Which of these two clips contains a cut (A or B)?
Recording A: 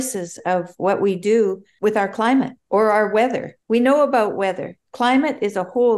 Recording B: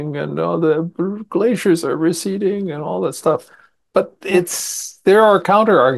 A